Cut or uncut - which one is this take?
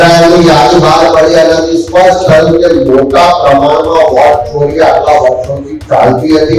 uncut